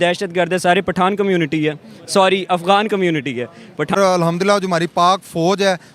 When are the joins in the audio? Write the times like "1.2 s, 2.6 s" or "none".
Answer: 4.0 s